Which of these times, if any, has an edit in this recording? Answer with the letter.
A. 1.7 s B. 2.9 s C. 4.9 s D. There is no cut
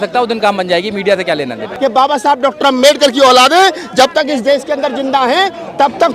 A